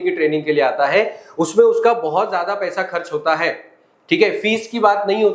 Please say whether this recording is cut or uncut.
uncut